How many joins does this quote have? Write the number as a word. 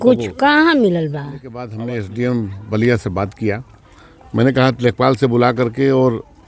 one